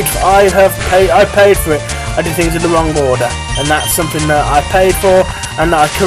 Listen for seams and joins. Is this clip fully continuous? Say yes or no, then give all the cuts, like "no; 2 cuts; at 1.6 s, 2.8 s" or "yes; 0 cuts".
yes; 0 cuts